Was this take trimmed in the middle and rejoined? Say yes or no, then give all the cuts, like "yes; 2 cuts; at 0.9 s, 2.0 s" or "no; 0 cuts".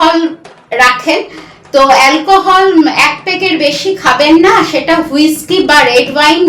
no; 0 cuts